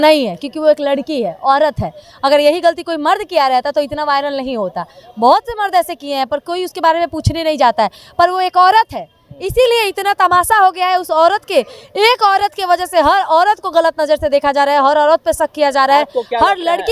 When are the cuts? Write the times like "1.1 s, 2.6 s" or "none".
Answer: none